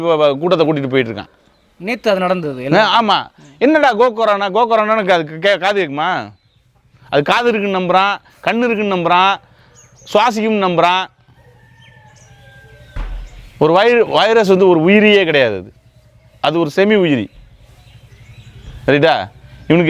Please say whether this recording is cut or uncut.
uncut